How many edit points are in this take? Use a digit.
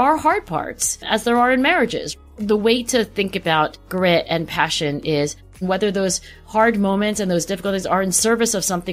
3